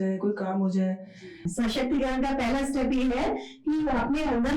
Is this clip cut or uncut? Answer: cut